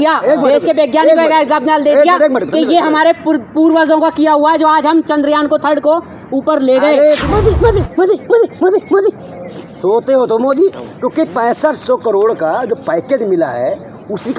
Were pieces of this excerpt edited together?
yes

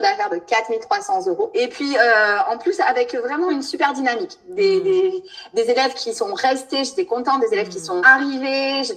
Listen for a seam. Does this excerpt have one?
yes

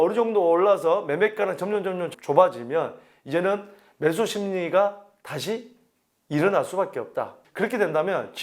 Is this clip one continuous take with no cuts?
no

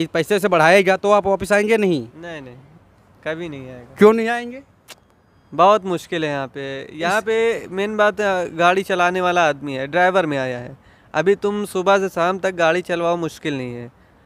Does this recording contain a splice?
no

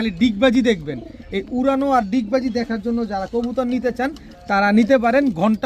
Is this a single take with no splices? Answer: yes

